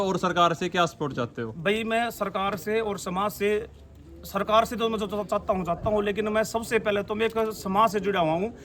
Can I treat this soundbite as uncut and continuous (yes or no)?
yes